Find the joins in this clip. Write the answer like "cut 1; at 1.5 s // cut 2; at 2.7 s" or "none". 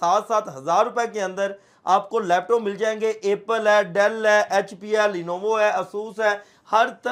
none